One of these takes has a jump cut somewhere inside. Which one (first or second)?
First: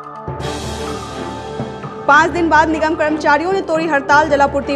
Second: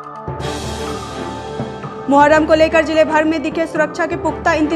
first